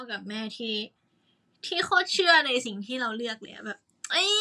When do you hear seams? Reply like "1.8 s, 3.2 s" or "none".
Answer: none